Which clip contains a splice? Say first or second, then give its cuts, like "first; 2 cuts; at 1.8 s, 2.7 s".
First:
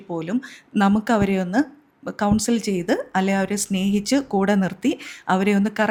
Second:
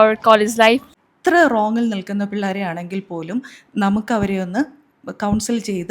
second; 1 cut; at 0.9 s